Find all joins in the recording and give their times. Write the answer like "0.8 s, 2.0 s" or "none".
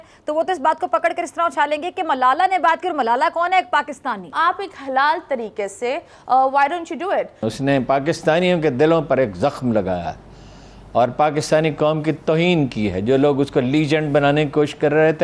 4.3 s, 7.5 s